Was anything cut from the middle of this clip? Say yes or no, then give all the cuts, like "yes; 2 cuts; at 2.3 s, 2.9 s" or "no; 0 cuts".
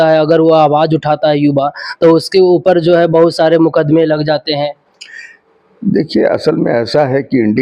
no; 0 cuts